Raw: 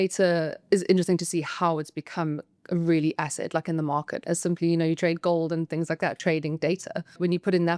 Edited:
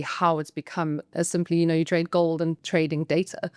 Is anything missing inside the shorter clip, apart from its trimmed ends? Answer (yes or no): yes